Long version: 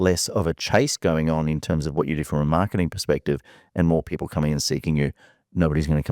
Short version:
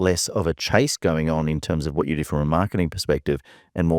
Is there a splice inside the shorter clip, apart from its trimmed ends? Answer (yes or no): no